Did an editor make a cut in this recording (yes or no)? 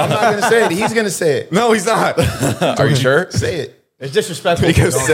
no